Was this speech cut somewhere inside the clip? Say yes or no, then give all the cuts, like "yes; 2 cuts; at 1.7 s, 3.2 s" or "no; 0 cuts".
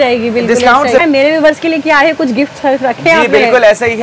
yes; 1 cut; at 1.0 s